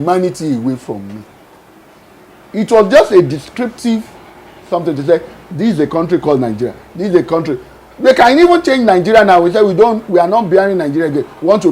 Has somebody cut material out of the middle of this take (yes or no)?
yes